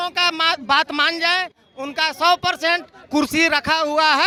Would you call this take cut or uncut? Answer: uncut